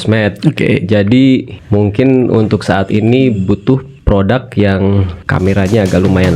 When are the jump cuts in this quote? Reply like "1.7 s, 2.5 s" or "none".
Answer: 1.6 s, 3.9 s, 5.2 s